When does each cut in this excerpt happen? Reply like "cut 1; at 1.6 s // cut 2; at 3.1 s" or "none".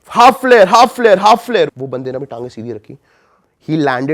cut 1; at 1.7 s